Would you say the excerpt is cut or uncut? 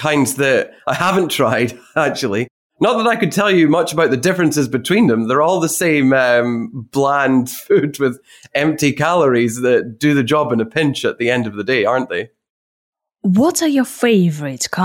uncut